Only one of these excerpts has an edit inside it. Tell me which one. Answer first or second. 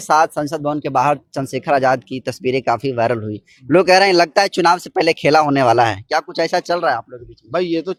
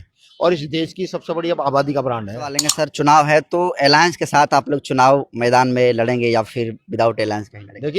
second